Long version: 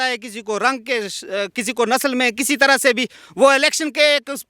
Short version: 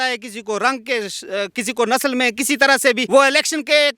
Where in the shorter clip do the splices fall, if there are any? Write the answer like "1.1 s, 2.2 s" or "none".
3.0 s